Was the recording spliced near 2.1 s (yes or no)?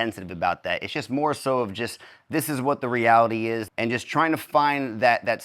no